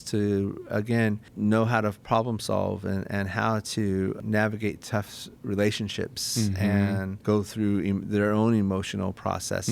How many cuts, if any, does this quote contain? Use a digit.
3